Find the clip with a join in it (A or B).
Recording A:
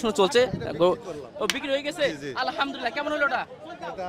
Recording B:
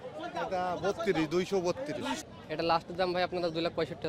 B